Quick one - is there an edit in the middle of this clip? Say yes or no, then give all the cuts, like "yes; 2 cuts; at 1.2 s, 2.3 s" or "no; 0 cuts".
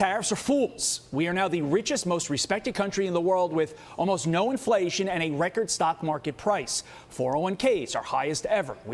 no; 0 cuts